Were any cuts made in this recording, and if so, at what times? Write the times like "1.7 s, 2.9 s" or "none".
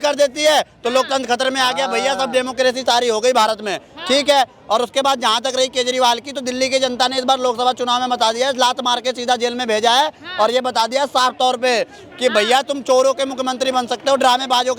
none